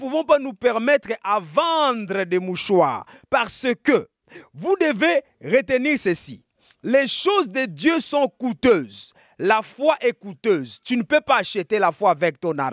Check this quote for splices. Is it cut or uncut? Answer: uncut